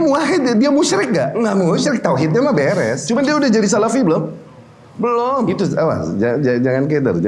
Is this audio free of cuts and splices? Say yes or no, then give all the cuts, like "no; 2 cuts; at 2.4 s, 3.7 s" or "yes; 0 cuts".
no; 3 cuts; at 1.3 s, 3.0 s, 5.5 s